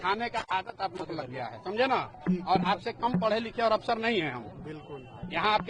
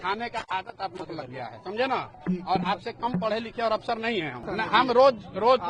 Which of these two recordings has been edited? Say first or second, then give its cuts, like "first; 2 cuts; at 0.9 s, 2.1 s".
second; 1 cut; at 4.5 s